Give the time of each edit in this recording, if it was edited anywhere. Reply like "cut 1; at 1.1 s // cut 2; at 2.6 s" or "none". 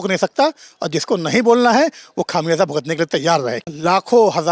cut 1; at 3.6 s